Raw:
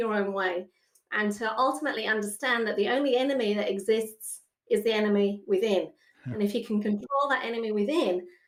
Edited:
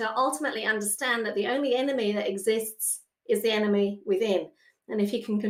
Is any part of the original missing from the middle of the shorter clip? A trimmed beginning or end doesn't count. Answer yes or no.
no